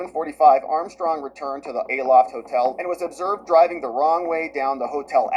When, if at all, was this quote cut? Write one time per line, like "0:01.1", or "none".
none